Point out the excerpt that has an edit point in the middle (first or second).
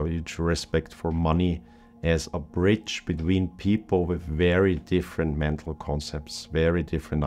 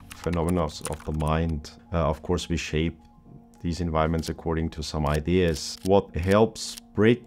second